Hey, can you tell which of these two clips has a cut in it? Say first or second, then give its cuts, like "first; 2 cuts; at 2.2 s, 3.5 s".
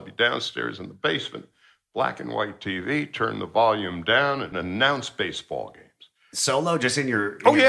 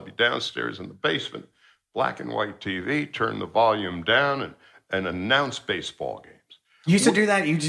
first; 2 cuts; at 4.6 s, 6.3 s